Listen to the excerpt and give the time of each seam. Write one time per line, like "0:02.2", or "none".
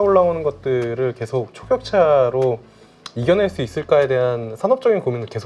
none